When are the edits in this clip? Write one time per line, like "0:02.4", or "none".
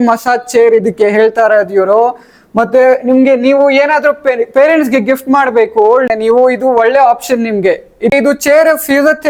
none